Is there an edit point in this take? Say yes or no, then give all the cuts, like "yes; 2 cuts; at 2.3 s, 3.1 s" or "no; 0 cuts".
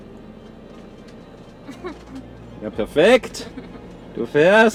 no; 0 cuts